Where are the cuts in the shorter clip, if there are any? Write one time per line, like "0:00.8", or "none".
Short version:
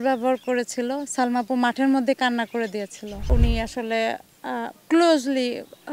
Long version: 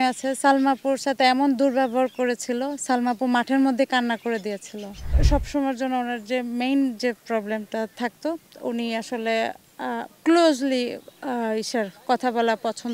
0:03.2